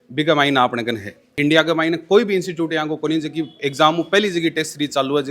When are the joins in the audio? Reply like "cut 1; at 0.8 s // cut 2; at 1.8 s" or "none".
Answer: none